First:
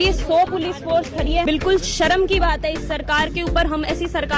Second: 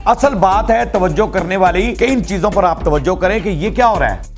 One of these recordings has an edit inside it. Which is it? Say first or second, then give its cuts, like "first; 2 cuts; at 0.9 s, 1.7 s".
second; 1 cut; at 1.9 s